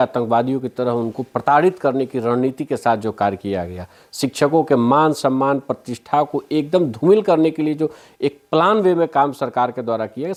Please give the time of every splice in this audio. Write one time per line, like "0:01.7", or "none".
none